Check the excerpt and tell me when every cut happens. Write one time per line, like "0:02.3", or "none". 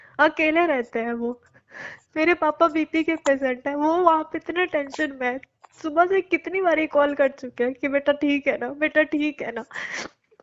none